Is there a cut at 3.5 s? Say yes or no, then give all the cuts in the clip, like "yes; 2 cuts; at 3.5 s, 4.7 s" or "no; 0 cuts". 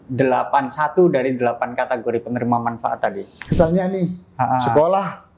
yes; 1 cut; at 3.5 s